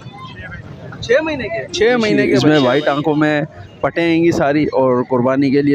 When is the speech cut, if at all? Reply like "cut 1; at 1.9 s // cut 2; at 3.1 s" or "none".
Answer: cut 1; at 2.3 s